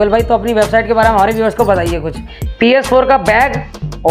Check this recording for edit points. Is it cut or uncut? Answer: cut